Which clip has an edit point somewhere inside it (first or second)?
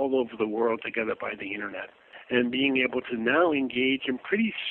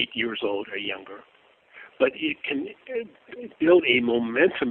first